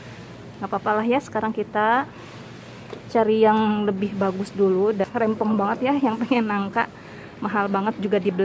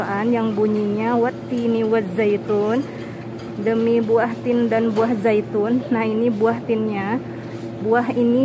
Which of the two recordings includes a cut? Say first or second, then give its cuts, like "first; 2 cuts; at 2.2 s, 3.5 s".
first; 1 cut; at 5.1 s